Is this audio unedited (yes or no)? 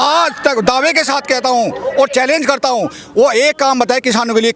yes